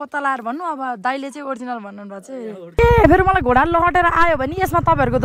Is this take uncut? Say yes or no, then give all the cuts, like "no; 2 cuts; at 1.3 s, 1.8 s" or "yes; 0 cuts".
no; 1 cut; at 2.8 s